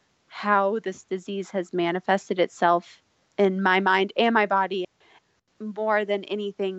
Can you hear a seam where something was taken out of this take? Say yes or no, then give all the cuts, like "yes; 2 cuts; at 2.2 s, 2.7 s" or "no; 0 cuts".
yes; 1 cut; at 4.9 s